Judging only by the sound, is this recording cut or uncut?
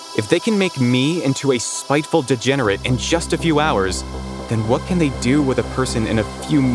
uncut